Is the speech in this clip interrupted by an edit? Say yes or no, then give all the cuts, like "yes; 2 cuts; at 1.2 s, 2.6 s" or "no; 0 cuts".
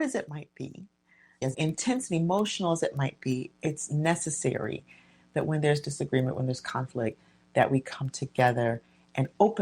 yes; 1 cut; at 1.3 s